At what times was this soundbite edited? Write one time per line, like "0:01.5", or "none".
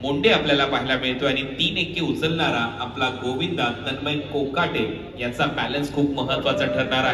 none

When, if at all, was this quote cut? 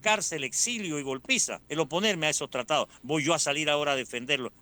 0:01.6

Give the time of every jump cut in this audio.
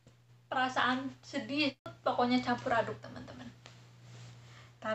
0:01.9

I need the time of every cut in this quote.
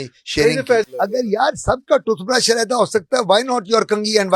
0:00.9

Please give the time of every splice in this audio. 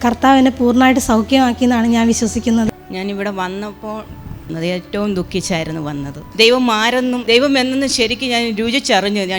0:04.5
0:06.3

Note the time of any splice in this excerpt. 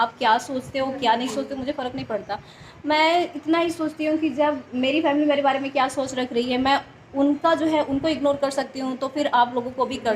none

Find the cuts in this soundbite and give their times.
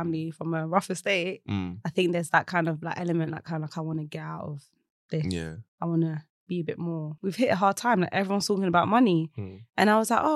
0:07.1

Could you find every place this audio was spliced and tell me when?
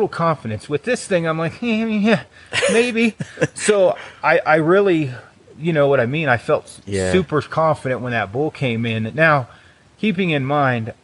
none

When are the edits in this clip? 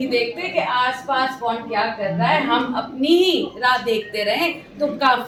none

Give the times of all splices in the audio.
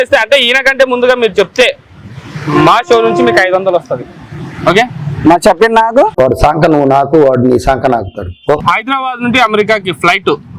0:08.6

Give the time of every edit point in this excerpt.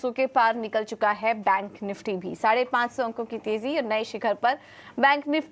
0:00.9

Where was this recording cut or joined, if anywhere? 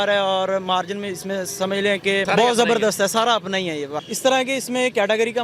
0:04.0

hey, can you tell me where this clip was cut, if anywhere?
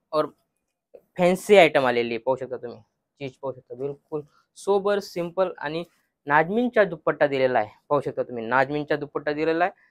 none

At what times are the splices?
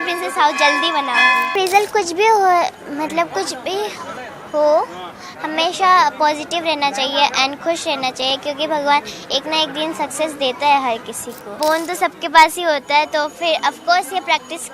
0:01.5
0:11.5

